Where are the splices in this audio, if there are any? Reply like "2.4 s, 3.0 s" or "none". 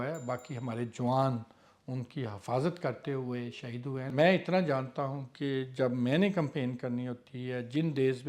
none

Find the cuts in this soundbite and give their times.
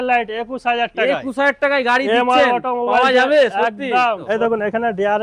4.2 s

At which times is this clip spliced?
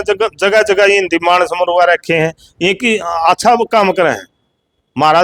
none

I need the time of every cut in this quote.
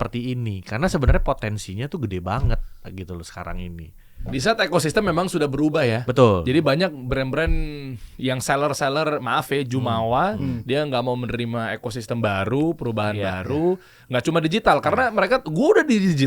none

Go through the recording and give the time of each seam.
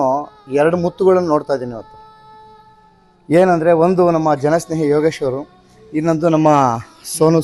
none

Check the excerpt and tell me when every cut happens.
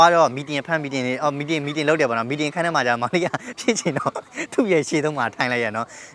none

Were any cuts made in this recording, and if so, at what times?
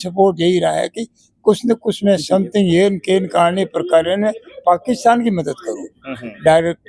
none

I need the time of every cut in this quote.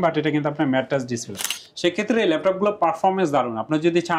1.6 s

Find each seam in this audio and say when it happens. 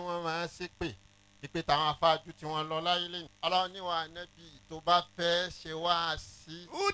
3.2 s

